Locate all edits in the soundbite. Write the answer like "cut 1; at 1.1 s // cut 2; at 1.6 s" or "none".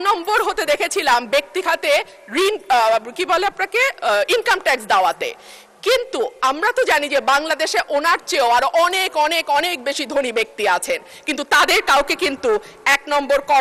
none